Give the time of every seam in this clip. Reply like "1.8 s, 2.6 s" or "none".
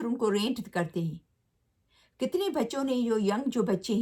none